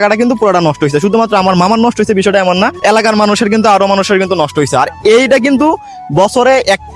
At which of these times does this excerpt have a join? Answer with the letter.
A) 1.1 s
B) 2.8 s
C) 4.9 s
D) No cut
B